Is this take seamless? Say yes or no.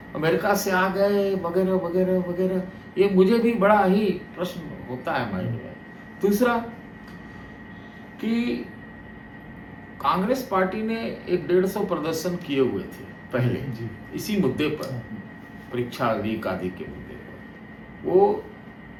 yes